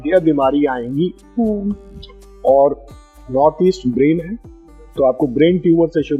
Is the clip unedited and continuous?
yes; 0 cuts

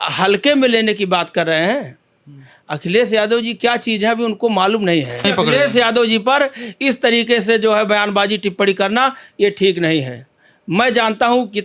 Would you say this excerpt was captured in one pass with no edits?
no; 1 cut; at 5.2 s

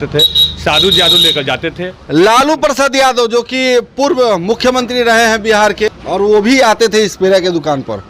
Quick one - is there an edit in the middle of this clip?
yes; 1 cut; at 5.8 s

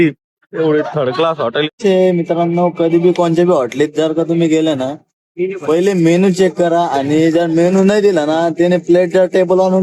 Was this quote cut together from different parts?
yes; 1 cut; at 1.7 s

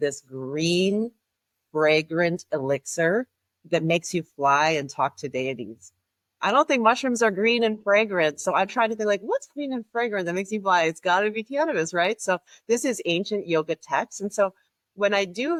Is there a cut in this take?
no; 0 cuts

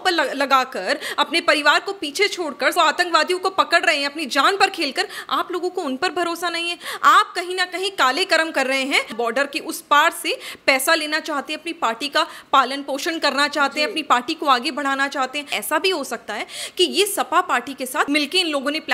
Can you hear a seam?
yes; 4 cuts; at 2.7 s, 6.9 s, 9.1 s, 15.5 s

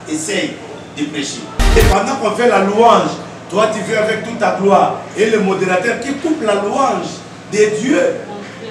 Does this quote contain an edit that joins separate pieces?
yes; 1 cut; at 1.8 s

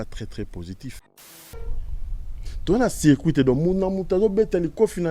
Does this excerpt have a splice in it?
yes; 1 cut; at 1.3 s

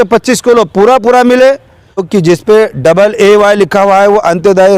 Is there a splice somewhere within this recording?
yes; 1 cut; at 2.1 s

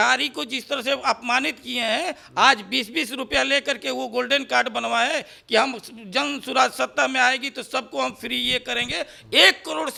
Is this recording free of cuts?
yes; 0 cuts

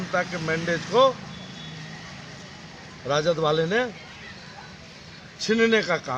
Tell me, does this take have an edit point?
no; 0 cuts

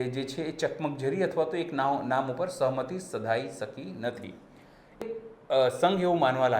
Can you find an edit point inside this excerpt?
yes; 1 cut; at 5.0 s

